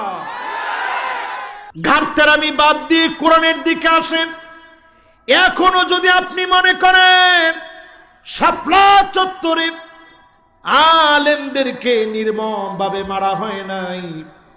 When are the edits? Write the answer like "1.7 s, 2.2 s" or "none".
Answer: 1.6 s